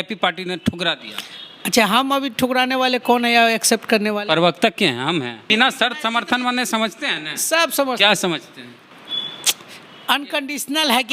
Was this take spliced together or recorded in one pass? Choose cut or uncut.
cut